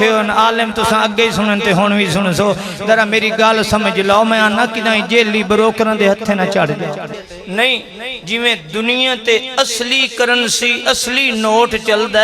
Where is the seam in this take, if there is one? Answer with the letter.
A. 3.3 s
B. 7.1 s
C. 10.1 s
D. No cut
B